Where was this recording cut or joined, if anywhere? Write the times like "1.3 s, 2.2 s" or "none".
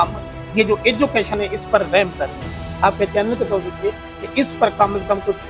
none

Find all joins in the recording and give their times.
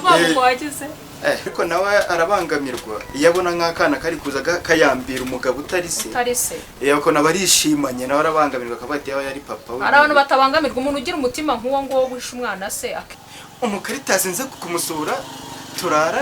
1.5 s, 13.1 s, 14.5 s

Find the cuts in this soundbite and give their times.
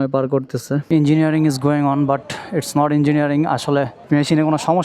0.8 s, 3.9 s

